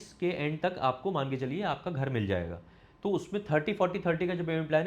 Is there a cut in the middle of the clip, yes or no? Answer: no